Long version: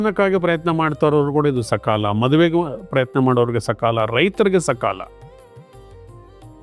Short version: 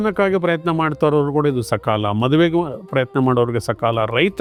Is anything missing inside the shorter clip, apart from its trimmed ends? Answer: no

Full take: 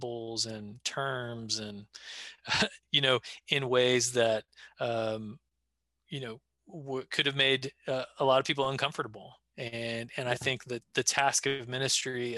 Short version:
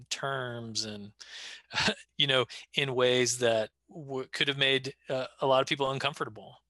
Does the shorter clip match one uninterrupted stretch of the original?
no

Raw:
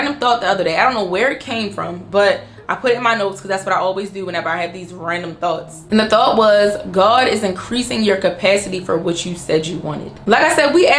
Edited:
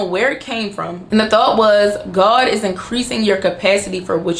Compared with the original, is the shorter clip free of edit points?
no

